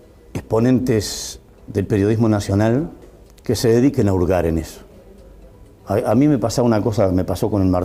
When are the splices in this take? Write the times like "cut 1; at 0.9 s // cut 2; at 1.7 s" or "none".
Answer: none